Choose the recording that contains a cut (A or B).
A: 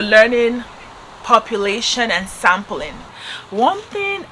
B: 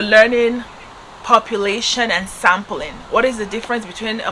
A